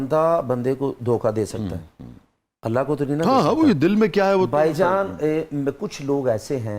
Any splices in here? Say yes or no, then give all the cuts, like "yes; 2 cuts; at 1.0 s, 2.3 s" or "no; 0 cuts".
no; 0 cuts